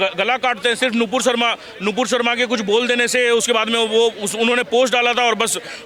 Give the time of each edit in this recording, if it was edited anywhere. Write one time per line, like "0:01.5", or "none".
none